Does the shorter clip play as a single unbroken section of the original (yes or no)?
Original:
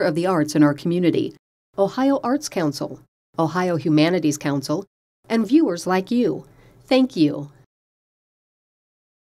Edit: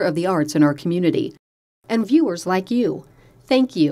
no